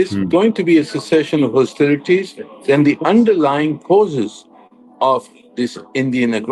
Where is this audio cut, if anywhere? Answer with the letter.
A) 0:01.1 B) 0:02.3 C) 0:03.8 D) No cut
D